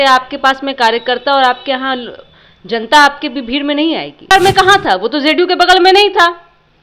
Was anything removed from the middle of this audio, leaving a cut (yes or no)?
yes